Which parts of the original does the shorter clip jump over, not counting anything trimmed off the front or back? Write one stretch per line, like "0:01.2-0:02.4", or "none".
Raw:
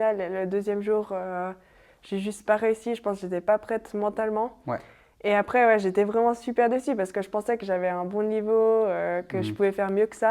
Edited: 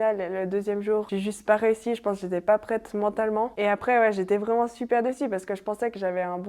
0:01.1-0:02.1
0:04.5-0:05.2